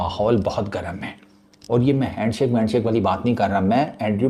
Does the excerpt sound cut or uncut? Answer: uncut